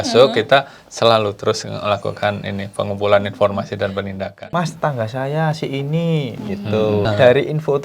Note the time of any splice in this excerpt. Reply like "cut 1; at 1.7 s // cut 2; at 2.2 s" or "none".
cut 1; at 4.3 s // cut 2; at 7.1 s